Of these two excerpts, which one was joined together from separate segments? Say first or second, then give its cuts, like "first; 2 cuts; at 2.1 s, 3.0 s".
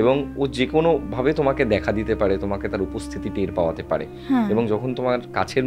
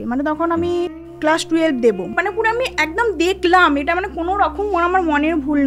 second; 2 cuts; at 1.1 s, 2.1 s